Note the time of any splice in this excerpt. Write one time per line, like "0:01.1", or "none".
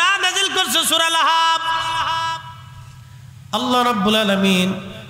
none